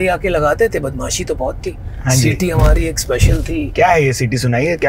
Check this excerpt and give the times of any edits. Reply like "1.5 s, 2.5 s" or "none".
3.7 s